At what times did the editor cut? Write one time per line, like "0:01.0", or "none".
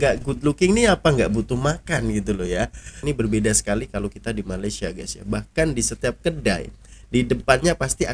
0:03.0